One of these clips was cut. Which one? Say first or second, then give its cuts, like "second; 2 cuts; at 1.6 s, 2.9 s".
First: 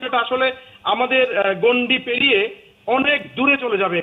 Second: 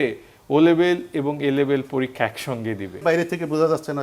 second; 1 cut; at 3.0 s